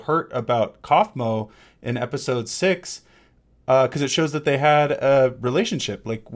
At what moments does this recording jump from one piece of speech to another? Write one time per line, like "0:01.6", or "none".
none